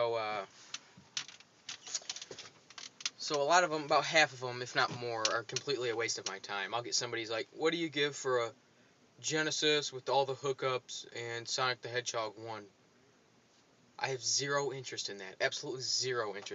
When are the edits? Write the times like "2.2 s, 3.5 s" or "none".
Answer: none